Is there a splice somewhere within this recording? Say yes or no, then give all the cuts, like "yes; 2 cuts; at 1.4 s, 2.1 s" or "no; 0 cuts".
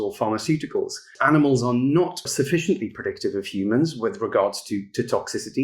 yes; 2 cuts; at 1.1 s, 2.3 s